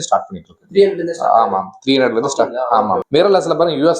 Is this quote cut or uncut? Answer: cut